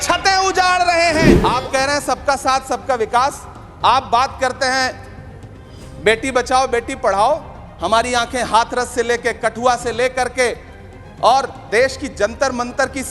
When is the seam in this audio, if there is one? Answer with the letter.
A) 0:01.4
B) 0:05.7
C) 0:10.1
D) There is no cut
A